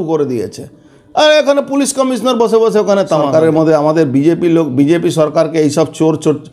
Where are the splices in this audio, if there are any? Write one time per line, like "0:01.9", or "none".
0:03.3